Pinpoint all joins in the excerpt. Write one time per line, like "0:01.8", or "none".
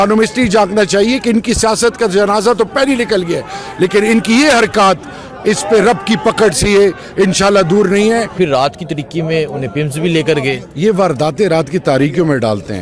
0:08.3